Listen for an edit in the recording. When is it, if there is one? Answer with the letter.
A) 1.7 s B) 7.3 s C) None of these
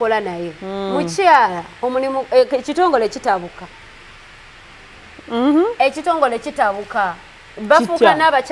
C